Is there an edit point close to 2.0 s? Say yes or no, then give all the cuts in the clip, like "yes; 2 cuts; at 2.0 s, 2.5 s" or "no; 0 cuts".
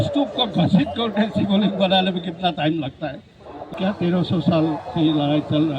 no; 1 cut; at 3.6 s